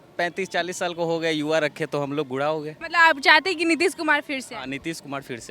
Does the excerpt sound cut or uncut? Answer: uncut